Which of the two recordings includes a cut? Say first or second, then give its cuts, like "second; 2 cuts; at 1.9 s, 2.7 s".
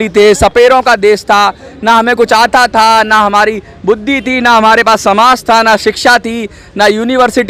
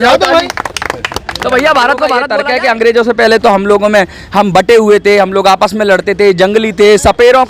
second; 1 cut; at 2.3 s